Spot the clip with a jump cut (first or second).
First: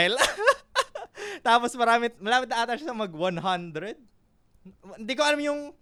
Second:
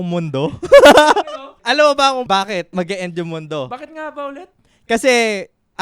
second